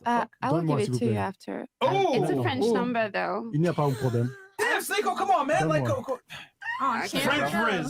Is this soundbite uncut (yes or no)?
yes